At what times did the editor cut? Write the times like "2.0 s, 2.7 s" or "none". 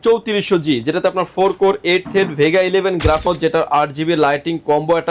3.3 s

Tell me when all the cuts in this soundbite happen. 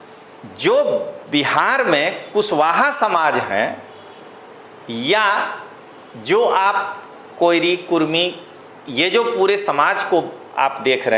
none

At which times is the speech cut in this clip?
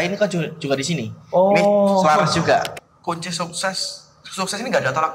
2.8 s

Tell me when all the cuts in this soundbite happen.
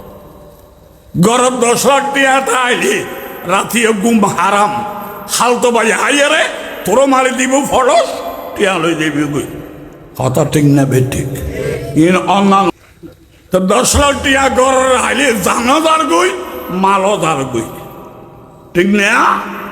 12.7 s

